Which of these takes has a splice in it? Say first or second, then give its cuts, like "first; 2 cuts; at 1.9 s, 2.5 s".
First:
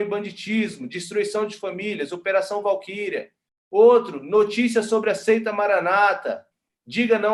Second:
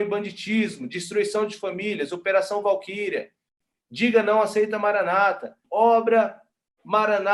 second; 2 cuts; at 3.5 s, 5.6 s